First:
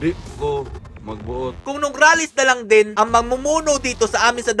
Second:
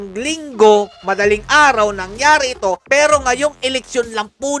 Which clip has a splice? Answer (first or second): first